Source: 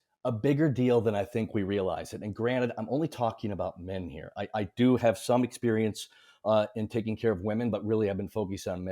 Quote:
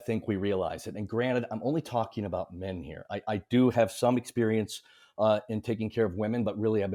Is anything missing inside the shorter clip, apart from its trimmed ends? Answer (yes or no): no